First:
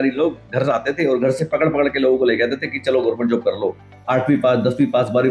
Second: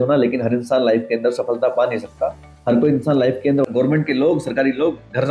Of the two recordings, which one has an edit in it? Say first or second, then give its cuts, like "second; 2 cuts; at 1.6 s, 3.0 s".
second; 1 cut; at 3.7 s